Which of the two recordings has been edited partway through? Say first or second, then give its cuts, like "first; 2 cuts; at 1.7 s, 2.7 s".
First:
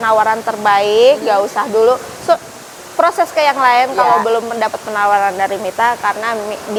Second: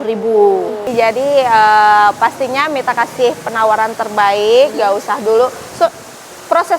second; 1 cut; at 0.9 s